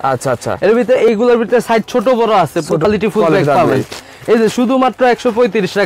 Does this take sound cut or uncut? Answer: cut